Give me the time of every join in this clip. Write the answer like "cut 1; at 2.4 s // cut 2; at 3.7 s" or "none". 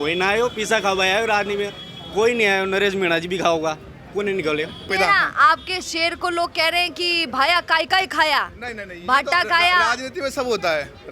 cut 1; at 4.9 s